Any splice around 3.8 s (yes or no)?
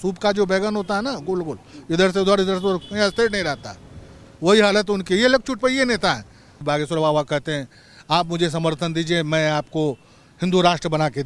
no